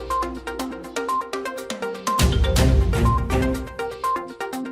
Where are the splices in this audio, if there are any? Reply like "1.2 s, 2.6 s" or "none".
none